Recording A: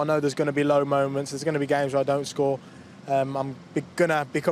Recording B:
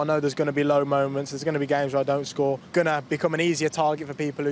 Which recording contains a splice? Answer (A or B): B